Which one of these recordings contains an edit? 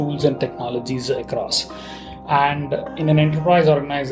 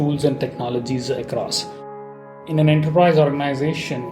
second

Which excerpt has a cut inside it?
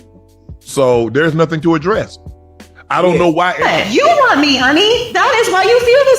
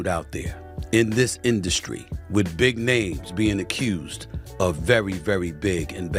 first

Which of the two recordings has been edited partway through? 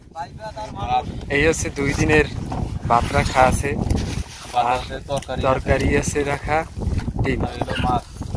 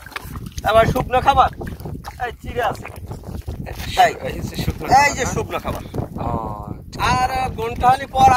second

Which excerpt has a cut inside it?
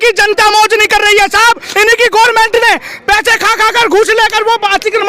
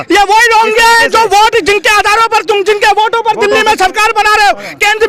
first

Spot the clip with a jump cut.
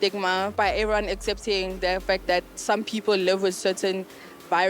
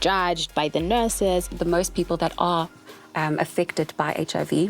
second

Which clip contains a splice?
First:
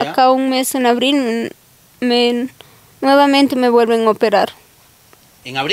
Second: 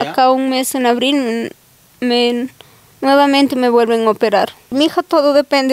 second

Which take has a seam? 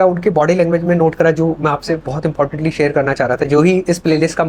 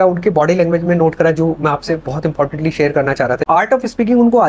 second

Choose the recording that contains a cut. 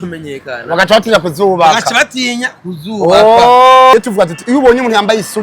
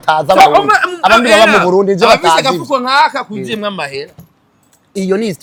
first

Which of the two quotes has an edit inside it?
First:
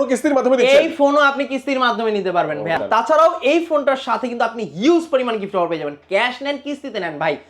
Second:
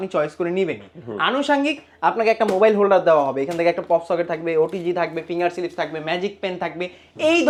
first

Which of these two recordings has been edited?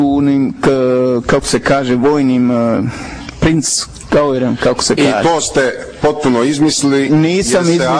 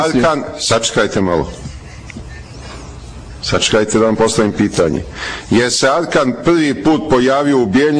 first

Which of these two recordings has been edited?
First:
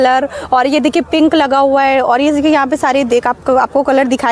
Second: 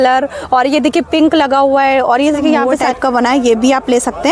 second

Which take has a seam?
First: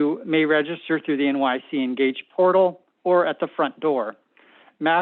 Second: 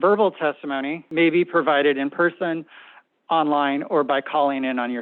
second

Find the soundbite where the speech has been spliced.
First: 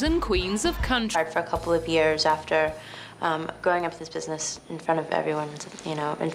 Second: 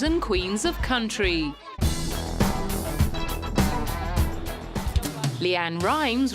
second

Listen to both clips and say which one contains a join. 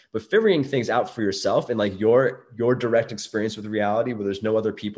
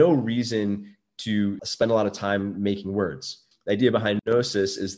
second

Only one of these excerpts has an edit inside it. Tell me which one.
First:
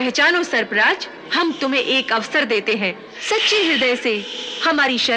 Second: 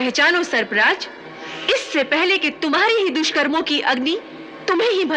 first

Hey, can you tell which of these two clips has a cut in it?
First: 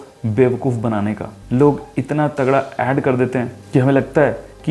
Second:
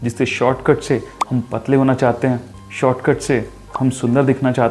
first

